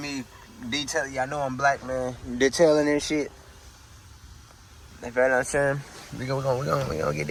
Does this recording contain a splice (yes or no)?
no